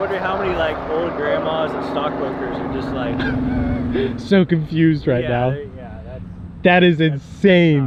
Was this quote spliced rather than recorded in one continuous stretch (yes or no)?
no